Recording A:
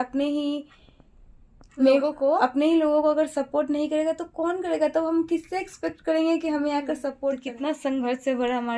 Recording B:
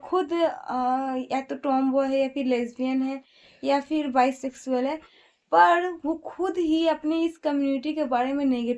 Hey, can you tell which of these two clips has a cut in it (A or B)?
A